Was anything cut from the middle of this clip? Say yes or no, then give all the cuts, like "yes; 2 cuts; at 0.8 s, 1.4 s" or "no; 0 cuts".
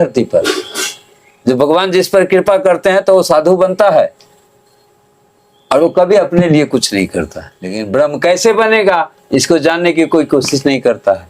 yes; 1 cut; at 7.8 s